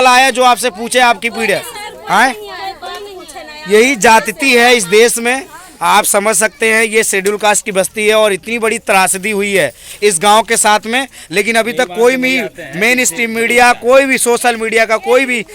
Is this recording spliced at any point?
no; 0 cuts

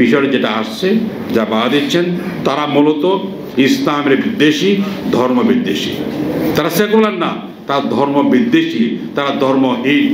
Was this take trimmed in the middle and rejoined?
no; 0 cuts

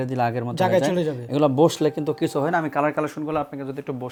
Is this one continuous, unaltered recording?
yes; 0 cuts

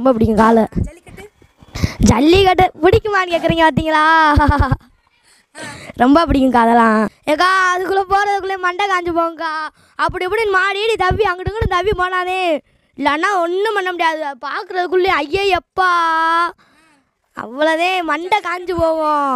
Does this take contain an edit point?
no; 0 cuts

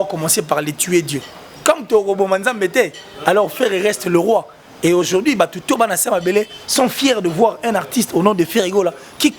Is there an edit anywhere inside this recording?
no; 0 cuts

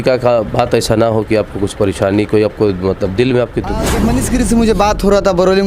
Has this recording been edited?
yes; 1 cut; at 3.9 s

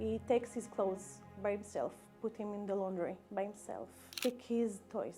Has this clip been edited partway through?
yes; 1 cut; at 4.1 s

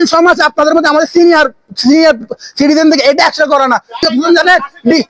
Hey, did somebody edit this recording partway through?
yes; 1 cut; at 4.0 s

